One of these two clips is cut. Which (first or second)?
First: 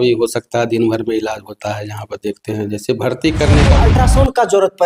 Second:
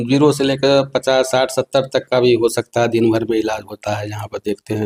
first